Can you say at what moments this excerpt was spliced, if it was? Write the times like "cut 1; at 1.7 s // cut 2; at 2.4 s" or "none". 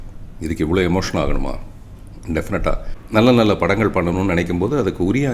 cut 1; at 3.0 s